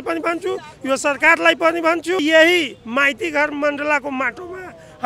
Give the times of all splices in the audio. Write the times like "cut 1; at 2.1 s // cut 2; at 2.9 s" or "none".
cut 1; at 2.2 s